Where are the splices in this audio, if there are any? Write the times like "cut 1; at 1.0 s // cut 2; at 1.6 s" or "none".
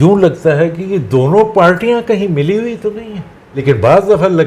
none